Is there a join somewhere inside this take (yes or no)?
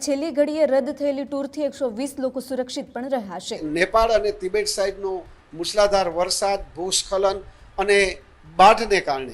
yes